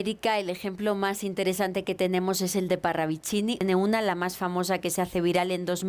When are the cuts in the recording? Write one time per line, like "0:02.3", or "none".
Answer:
0:03.6